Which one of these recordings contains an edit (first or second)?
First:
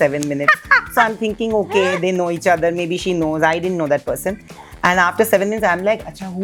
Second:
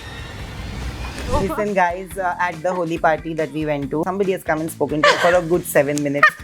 second